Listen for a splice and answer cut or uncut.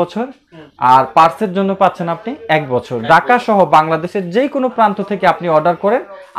uncut